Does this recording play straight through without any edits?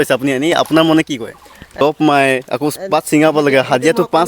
no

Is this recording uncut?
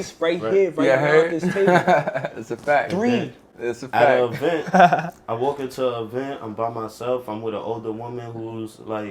yes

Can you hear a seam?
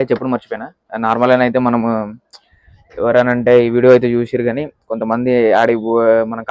no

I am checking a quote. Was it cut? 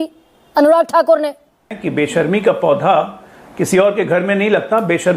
yes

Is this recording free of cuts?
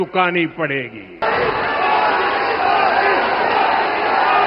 no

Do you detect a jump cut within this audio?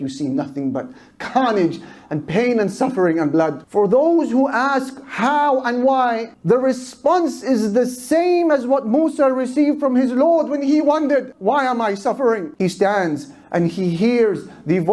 yes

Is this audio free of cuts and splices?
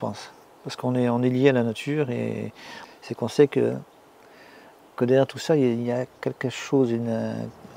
yes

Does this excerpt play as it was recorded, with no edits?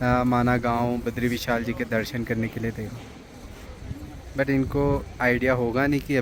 yes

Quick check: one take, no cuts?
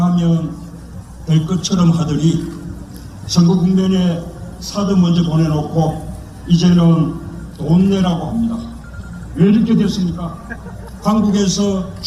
yes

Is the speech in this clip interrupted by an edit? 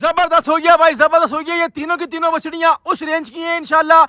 no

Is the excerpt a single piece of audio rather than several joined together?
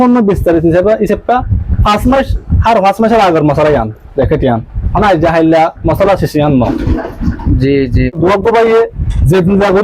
no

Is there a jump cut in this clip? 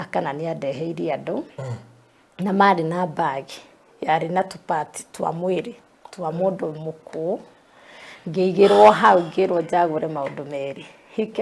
no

